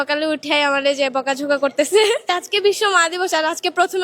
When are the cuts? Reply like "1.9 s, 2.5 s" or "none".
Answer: 2.3 s